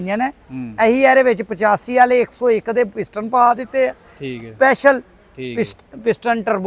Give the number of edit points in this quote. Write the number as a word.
zero